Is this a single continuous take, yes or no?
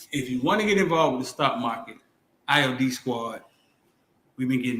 no